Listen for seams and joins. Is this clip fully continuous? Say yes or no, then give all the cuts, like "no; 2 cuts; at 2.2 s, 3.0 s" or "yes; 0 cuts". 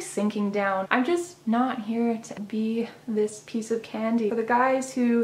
no; 3 cuts; at 0.9 s, 2.3 s, 4.3 s